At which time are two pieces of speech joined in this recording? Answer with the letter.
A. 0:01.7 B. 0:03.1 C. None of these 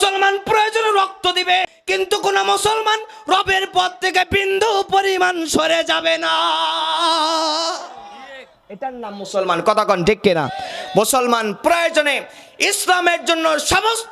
A